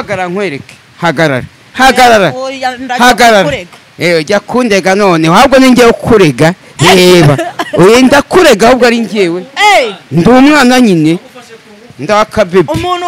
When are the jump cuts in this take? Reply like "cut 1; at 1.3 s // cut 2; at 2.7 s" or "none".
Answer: none